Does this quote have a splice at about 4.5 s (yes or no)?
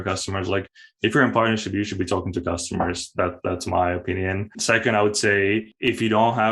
yes